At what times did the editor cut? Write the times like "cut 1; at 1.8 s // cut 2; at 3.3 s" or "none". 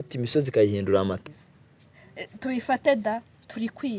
cut 1; at 1.2 s